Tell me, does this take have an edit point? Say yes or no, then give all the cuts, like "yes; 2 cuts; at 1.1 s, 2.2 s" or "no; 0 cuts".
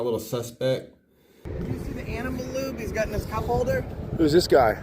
yes; 1 cut; at 1.4 s